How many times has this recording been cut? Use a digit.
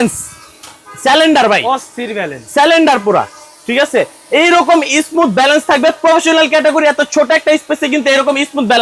0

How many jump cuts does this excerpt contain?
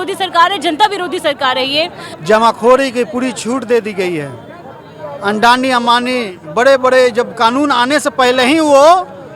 1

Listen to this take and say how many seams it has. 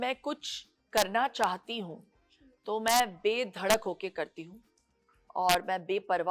0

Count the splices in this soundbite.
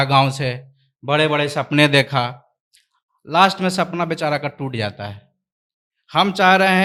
0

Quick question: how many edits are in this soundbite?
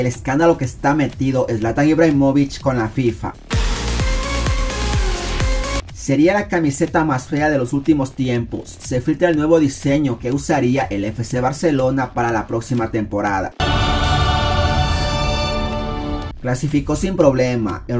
3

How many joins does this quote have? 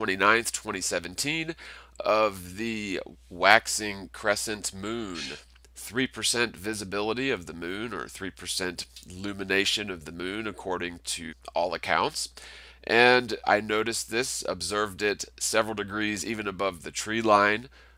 0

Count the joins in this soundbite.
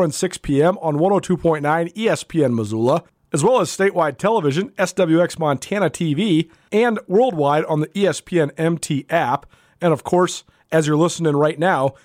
2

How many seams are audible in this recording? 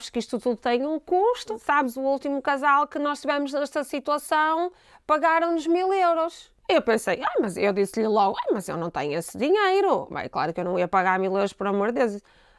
1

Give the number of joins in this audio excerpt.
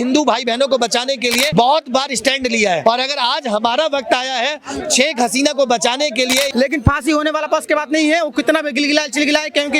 3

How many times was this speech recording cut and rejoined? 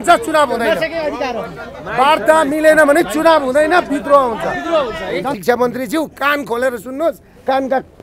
1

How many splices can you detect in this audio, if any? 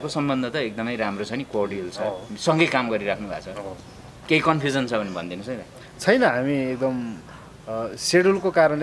0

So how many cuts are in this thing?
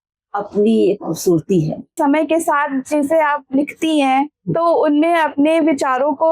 1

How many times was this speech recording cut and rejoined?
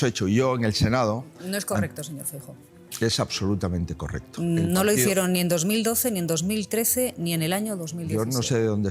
0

